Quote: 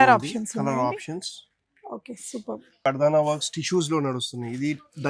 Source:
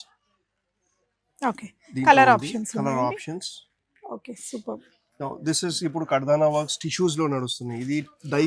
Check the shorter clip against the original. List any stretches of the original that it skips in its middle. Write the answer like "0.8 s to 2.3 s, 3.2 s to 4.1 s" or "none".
5.0 s to 6.1 s